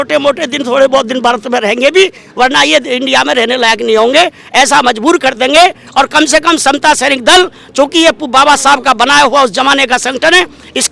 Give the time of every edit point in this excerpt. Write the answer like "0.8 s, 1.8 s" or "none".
none